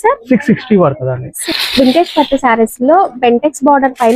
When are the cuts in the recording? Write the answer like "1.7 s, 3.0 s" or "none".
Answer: 1.3 s